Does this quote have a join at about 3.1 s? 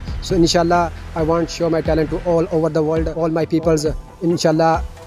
yes; 1 cut; at 3.1 s

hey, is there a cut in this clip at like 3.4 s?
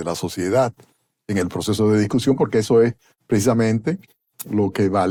no; 0 cuts

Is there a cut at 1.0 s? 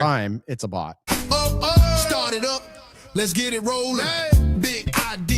yes; 1 cut; at 1.0 s

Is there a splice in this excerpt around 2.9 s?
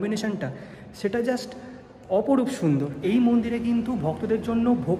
yes; 1 cut; at 2.9 s

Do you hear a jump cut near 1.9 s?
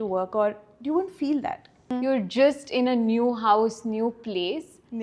yes; 1 cut; at 1.9 s

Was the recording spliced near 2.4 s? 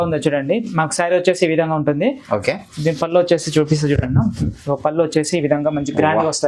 no; 0 cuts

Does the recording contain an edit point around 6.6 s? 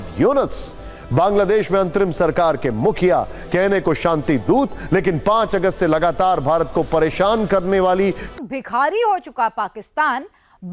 no; 1 cut; at 8.2 s

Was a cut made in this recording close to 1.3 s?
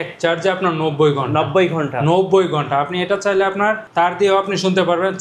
no; 1 cut; at 3.8 s

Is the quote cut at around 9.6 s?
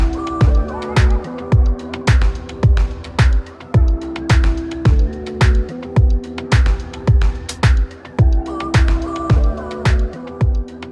yes; 3 cuts; at 0.8 s, 5.3 s, 9.6 s

